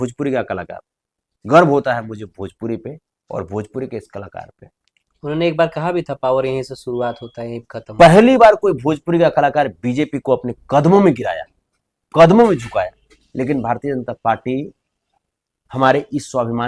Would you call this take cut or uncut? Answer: uncut